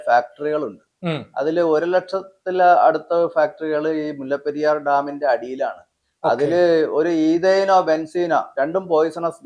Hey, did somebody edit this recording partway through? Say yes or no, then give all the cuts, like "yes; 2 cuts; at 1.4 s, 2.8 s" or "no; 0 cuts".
no; 0 cuts